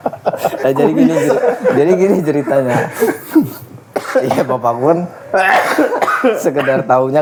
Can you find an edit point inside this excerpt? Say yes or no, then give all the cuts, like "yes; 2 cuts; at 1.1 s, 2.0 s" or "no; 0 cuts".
no; 0 cuts